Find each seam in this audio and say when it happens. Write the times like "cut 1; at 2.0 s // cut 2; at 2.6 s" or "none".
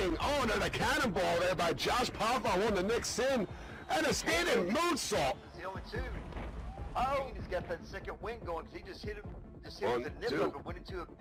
none